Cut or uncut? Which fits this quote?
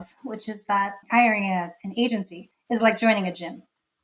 cut